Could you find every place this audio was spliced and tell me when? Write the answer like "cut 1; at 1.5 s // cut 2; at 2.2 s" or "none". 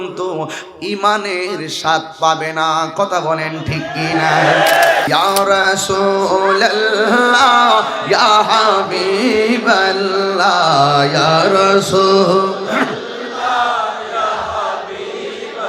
cut 1; at 5.1 s